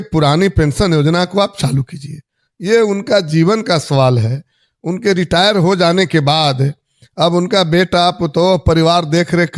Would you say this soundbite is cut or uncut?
uncut